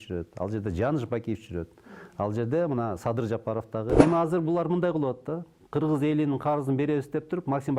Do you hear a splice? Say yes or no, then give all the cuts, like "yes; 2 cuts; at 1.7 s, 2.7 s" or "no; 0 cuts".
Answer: yes; 1 cut; at 4.0 s